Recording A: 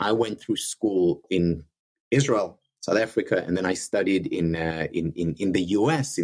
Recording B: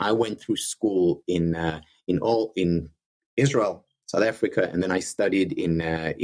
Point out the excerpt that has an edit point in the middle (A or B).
A